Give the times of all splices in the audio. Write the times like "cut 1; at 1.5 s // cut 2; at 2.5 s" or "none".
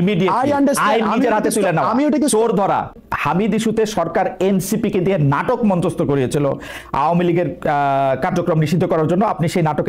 cut 1; at 3.0 s